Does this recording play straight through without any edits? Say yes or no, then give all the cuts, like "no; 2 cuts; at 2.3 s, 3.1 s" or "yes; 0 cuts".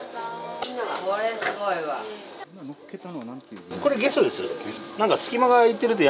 no; 1 cut; at 2.4 s